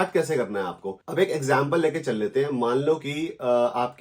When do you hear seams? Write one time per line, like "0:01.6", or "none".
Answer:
0:00.9